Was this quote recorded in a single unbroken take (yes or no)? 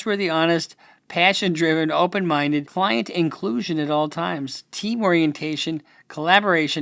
no